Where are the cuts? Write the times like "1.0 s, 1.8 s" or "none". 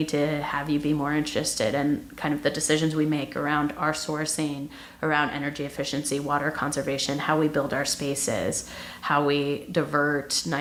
none